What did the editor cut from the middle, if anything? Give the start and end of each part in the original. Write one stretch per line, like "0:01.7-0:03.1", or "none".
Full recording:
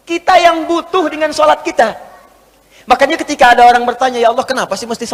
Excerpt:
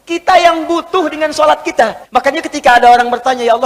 0:02.0-0:02.8